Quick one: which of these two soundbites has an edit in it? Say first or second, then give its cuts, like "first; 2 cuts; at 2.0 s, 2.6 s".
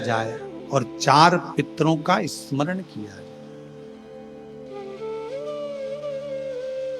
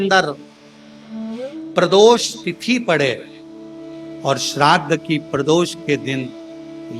first; 3 cuts; at 3.3 s, 4.5 s, 5.7 s